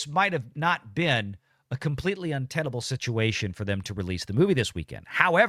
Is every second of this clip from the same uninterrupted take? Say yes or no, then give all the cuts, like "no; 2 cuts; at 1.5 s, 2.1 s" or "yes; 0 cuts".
yes; 0 cuts